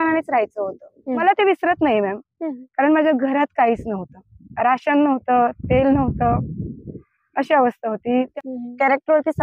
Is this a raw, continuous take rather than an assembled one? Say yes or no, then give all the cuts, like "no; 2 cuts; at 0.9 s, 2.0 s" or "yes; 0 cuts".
no; 2 cuts; at 1.2 s, 8.3 s